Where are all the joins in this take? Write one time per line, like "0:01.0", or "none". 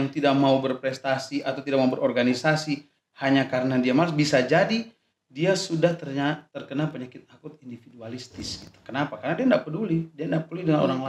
none